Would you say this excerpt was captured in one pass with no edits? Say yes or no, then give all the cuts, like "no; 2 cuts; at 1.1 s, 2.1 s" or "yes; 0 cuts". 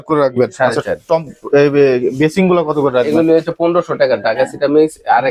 yes; 0 cuts